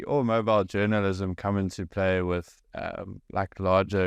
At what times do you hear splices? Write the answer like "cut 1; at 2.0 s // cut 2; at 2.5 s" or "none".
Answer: none